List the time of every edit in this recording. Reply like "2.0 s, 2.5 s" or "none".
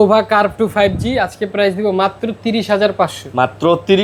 none